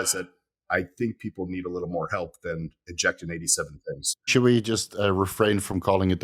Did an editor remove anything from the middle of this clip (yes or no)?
yes